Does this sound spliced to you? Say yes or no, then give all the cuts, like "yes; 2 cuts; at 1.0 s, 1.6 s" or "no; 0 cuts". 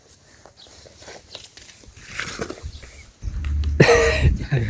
yes; 1 cut; at 3.2 s